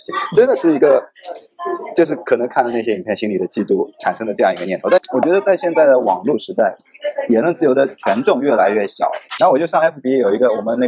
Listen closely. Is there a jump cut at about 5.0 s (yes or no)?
yes